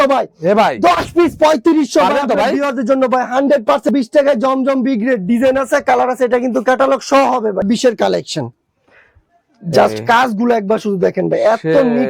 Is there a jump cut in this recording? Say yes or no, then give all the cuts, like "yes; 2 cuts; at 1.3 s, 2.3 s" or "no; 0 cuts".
yes; 2 cuts; at 3.9 s, 7.6 s